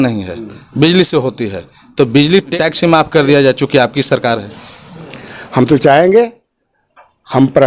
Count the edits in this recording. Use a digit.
1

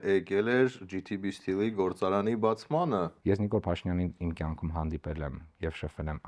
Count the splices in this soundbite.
1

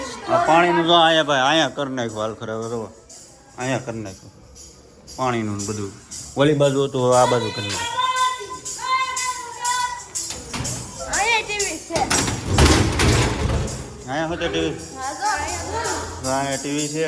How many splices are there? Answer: 0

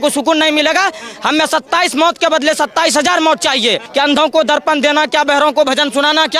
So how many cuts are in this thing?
1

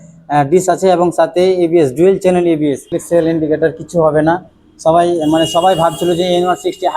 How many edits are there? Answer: 1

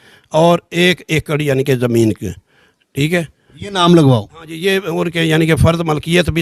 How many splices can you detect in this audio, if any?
0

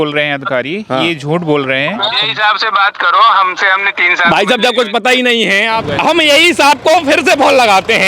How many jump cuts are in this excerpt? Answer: 2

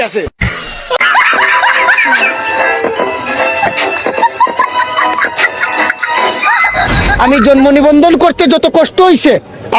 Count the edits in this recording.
1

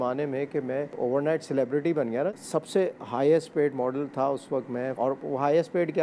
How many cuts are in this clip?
3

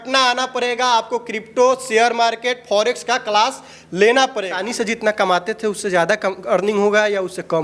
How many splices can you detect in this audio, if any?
1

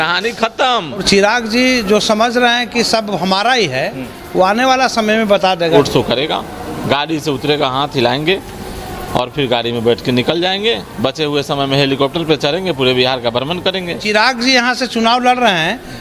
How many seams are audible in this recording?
3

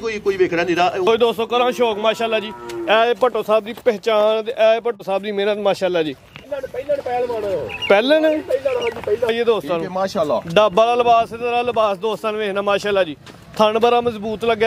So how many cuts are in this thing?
3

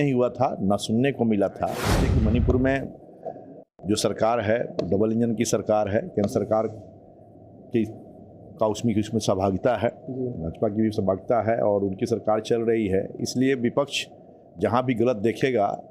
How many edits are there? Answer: 1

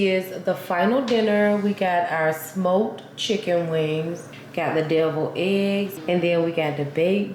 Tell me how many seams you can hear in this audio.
2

